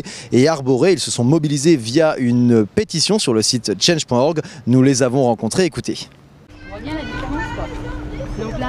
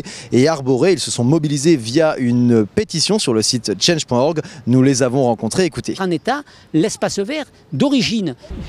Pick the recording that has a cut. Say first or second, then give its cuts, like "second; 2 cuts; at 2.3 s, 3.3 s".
first; 1 cut; at 6.0 s